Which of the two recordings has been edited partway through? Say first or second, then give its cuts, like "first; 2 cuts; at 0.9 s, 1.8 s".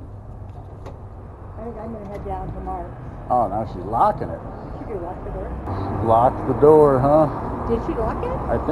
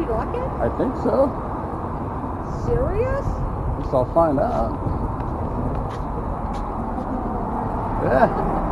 first; 1 cut; at 5.7 s